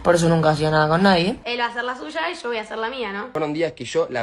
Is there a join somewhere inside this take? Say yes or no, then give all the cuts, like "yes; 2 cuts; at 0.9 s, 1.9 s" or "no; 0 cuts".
yes; 2 cuts; at 1.4 s, 3.3 s